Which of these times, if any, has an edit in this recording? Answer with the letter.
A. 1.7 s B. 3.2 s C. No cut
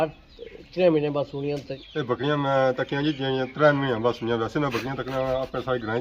A